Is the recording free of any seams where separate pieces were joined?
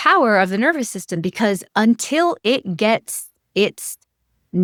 yes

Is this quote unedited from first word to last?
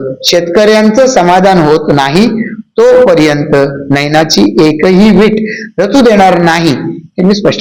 yes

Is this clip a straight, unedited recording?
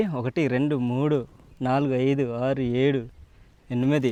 yes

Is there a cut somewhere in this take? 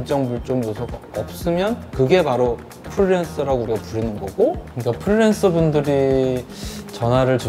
yes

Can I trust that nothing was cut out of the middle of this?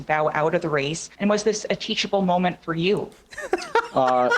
no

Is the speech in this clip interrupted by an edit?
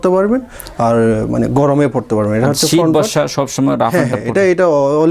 no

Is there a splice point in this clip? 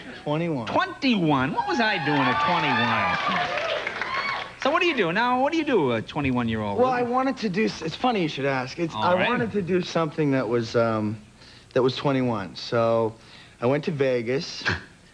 yes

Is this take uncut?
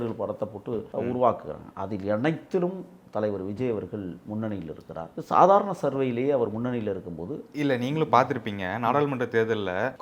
yes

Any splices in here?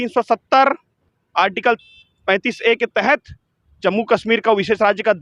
no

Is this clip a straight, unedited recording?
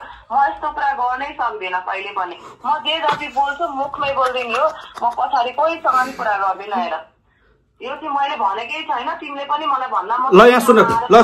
yes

